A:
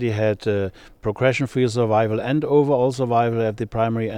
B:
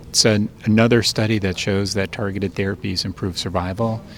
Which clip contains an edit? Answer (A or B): A